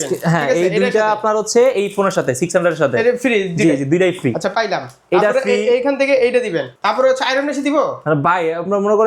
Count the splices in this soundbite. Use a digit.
1